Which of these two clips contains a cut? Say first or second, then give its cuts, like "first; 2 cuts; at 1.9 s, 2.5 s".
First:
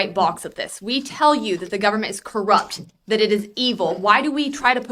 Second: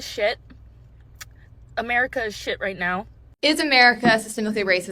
second; 1 cut; at 3.3 s